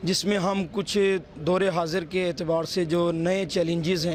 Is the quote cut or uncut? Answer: uncut